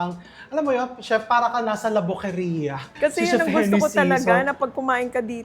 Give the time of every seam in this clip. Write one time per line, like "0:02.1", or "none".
0:02.8